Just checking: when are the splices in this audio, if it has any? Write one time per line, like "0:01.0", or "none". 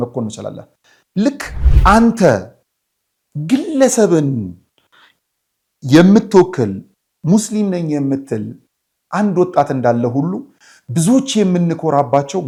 none